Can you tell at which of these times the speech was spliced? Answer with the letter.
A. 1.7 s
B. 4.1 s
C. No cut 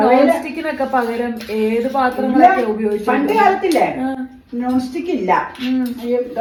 C